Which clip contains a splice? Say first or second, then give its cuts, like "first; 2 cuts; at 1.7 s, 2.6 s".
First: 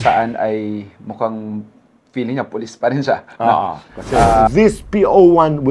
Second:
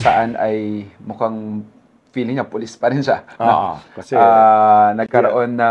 first; 1 cut; at 4.5 s